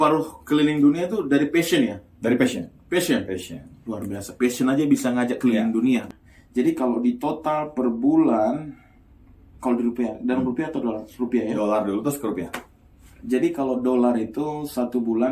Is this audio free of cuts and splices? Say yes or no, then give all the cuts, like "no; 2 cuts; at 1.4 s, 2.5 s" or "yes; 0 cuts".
no; 1 cut; at 6.1 s